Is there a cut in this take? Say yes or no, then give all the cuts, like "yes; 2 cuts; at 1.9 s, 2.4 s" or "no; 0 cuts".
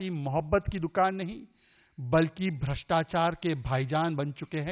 no; 0 cuts